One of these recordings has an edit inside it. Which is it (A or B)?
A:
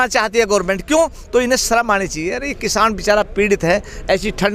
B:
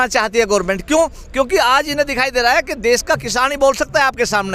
A